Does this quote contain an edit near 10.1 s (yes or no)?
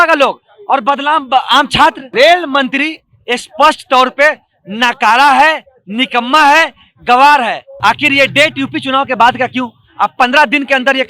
no